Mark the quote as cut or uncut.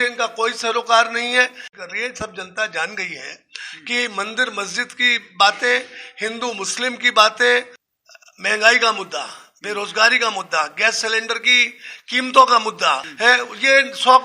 cut